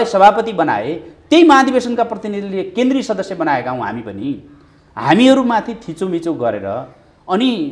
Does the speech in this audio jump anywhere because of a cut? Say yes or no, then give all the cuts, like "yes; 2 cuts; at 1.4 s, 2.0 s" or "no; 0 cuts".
no; 0 cuts